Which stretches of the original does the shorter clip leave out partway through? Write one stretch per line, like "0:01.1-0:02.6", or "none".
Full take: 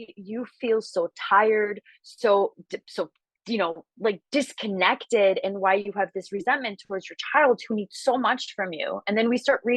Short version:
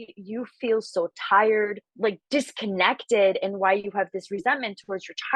0:01.8-0:03.9